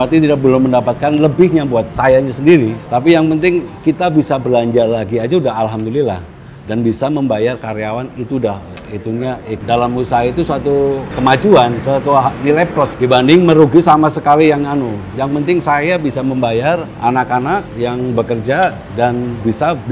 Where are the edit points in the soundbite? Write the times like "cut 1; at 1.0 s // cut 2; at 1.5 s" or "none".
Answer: cut 1; at 1.9 s // cut 2; at 9.6 s